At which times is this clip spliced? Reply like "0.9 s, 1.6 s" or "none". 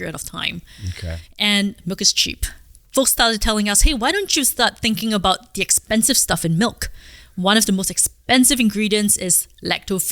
2.8 s